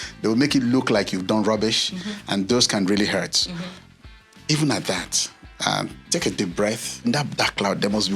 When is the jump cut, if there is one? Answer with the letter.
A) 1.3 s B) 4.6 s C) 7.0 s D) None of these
C